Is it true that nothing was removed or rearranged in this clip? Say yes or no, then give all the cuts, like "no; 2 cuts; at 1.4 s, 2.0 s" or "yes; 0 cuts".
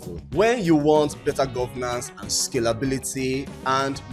yes; 0 cuts